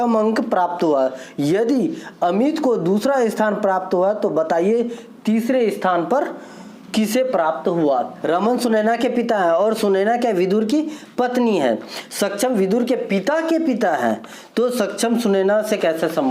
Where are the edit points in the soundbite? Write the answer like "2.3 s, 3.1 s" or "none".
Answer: 8.1 s